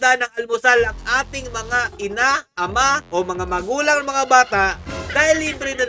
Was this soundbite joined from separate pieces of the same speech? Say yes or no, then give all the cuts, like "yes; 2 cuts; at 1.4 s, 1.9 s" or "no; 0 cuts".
no; 0 cuts